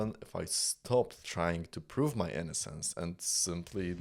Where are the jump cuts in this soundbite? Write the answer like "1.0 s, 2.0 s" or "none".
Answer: none